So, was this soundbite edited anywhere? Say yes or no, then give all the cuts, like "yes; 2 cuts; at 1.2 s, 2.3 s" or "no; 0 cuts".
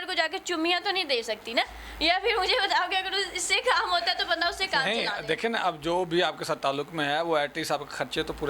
no; 0 cuts